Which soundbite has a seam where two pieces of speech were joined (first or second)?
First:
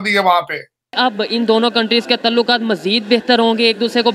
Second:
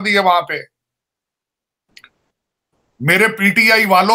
first